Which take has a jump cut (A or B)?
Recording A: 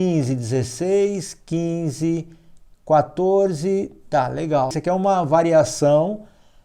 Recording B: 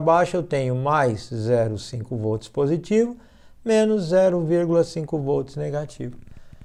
A